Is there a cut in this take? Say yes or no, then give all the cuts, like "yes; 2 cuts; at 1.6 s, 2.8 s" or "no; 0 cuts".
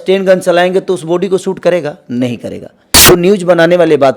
yes; 1 cut; at 2.9 s